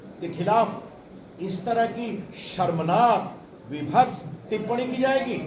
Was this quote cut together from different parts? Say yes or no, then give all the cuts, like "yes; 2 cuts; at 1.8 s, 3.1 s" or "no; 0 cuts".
no; 0 cuts